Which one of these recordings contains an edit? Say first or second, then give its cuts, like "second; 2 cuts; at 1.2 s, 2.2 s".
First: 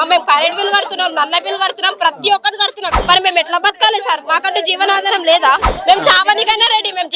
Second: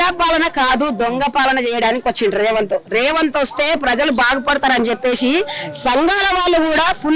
first; 2 cuts; at 2.9 s, 5.7 s